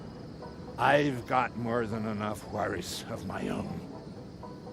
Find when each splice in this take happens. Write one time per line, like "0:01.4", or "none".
0:03.8